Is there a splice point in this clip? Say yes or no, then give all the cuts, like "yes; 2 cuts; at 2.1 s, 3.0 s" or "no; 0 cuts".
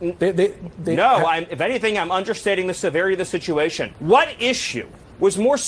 yes; 1 cut; at 3.9 s